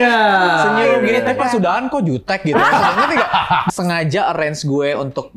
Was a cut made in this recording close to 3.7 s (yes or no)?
yes